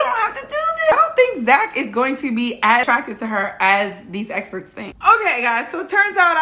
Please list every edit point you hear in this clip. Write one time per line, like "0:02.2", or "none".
0:00.9
0:02.8
0:04.8